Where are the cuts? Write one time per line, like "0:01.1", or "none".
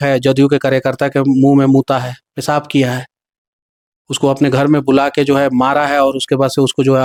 none